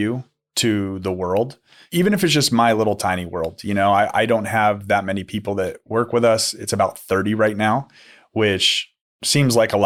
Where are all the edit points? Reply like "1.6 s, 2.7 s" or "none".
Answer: none